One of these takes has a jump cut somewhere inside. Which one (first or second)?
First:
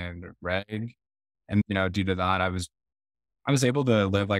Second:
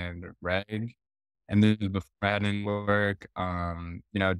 first